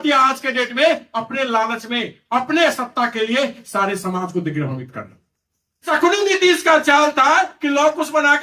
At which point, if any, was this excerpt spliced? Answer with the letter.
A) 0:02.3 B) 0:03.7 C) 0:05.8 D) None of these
C